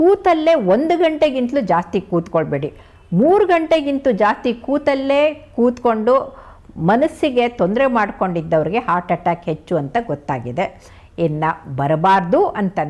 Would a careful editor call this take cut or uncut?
uncut